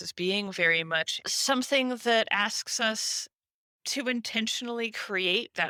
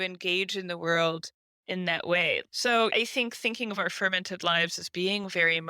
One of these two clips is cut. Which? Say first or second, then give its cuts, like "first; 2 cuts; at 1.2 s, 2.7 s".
second; 1 cut; at 2.5 s